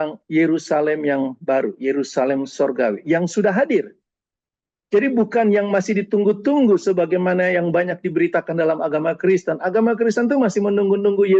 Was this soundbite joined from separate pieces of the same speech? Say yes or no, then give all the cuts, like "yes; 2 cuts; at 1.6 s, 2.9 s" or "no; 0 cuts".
no; 0 cuts